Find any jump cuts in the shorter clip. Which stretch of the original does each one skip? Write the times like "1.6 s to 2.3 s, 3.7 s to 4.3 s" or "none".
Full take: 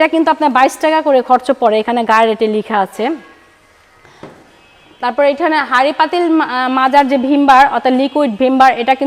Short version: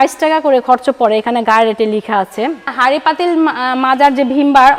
3.3 s to 5.7 s